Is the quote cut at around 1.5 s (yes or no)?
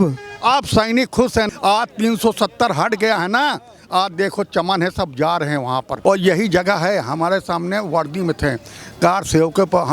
yes